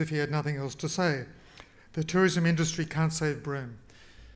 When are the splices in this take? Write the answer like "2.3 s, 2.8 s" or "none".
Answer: none